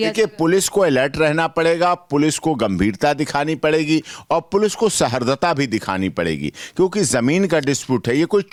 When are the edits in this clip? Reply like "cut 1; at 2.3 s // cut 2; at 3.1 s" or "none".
none